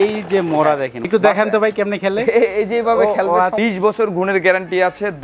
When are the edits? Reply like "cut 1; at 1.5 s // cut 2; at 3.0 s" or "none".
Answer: cut 1; at 1.0 s // cut 2; at 3.6 s